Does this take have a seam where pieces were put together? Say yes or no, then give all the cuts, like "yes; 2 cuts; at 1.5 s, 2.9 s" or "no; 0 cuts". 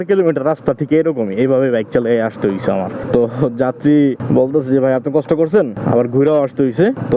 no; 0 cuts